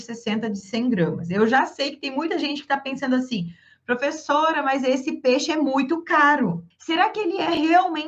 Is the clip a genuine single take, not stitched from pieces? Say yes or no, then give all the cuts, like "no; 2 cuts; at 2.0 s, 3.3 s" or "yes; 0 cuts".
no; 1 cut; at 6.7 s